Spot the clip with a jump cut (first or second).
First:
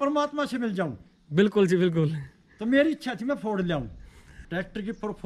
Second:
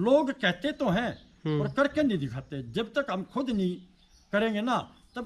first